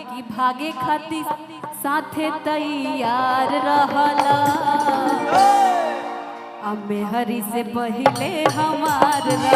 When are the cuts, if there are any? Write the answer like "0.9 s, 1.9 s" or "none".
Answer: none